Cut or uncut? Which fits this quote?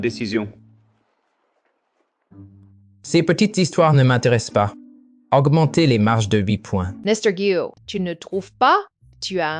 cut